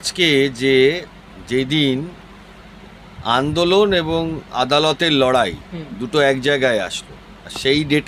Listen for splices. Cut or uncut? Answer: uncut